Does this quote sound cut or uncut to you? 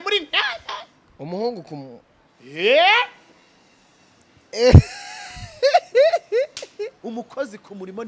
cut